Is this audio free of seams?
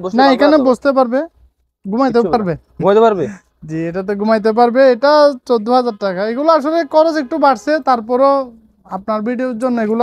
yes; 0 cuts

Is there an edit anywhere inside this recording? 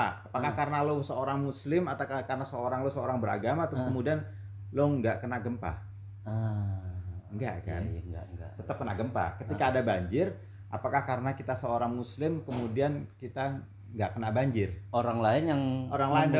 no; 0 cuts

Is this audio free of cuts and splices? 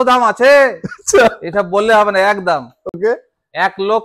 yes; 0 cuts

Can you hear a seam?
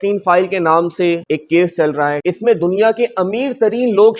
yes; 2 cuts; at 1.2 s, 2.2 s

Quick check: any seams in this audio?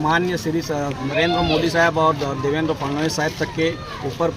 yes; 1 cut; at 1.0 s

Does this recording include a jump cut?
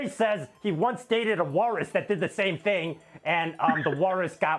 no; 0 cuts

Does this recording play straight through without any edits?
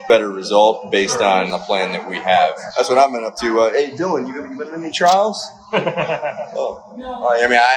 no; 2 cuts; at 1.6 s, 2.6 s

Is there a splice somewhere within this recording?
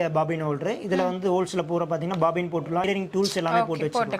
yes; 1 cut; at 2.8 s

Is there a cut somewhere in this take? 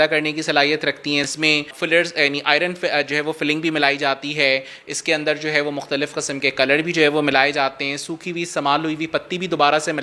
yes; 1 cut; at 1.3 s

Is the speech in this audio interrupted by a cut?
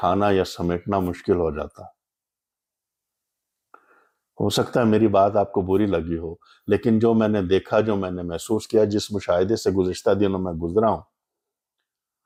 no; 0 cuts

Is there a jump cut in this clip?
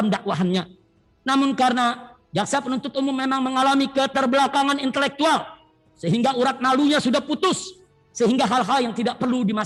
no; 0 cuts

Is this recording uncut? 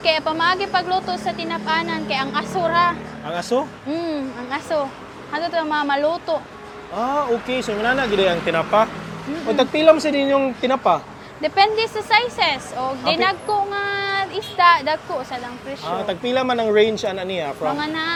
yes; 0 cuts

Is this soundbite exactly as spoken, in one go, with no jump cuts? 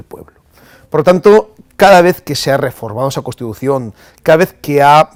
yes; 0 cuts

